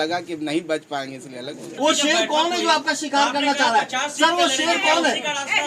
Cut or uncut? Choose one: cut